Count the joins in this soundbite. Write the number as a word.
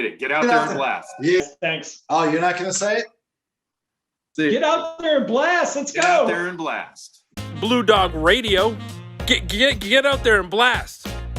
one